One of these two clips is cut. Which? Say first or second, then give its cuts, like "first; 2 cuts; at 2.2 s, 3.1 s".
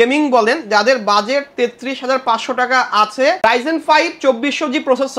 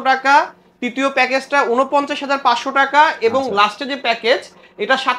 first; 1 cut; at 3.4 s